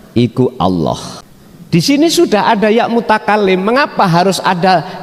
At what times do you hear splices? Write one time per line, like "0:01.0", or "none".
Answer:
0:01.8